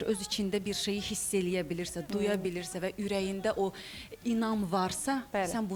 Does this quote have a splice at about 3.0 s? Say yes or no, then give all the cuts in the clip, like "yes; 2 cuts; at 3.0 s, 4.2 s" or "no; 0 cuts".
no; 0 cuts